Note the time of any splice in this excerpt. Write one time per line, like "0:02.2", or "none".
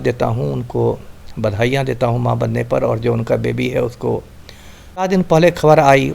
0:05.1